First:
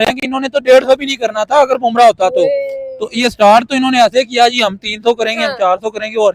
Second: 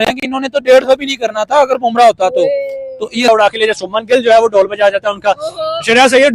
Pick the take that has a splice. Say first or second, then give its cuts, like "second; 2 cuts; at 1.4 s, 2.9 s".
second; 1 cut; at 3.3 s